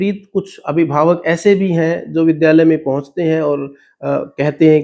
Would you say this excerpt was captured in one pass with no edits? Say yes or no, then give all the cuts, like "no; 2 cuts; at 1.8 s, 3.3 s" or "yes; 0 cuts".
yes; 0 cuts